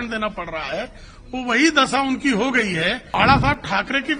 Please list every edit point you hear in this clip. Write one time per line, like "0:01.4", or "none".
0:03.0

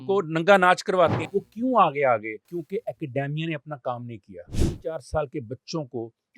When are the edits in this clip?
0:01.2
0:02.4
0:04.5

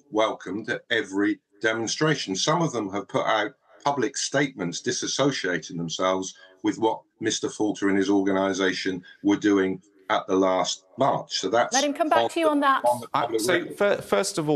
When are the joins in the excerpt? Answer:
none

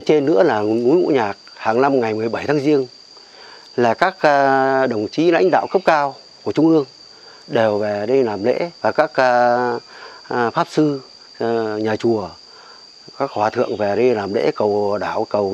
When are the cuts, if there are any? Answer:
none

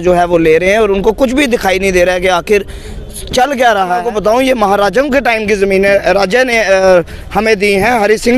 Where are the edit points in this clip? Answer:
0:04.0

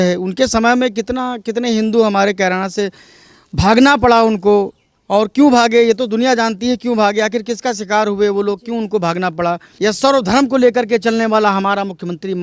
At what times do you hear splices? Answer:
0:09.7

